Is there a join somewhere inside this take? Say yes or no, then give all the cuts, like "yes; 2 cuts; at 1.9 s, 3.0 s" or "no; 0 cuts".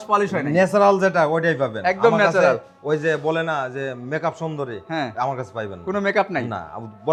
no; 0 cuts